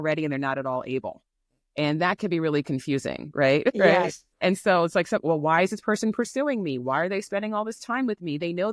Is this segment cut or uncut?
uncut